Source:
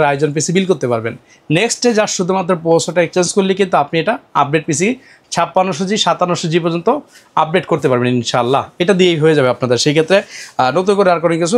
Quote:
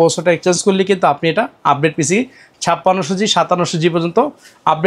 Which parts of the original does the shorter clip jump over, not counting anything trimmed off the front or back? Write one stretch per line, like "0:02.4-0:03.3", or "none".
none